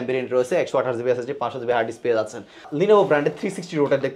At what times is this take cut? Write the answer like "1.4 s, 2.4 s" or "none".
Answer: 2.7 s